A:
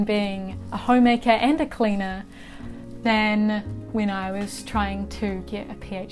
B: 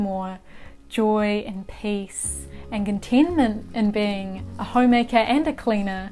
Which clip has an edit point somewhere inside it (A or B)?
A